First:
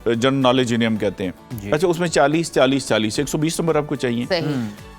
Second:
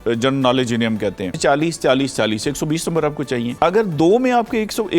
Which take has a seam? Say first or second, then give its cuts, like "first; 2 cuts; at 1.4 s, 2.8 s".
second; 2 cuts; at 1.4 s, 3.5 s